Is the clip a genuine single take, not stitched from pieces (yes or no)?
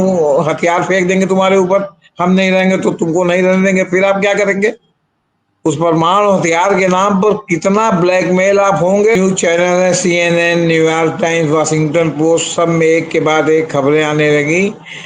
no